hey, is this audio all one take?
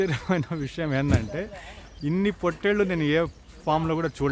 yes; 0 cuts

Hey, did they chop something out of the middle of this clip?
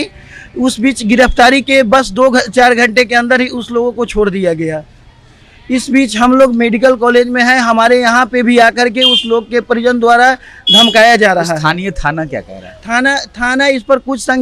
no; 0 cuts

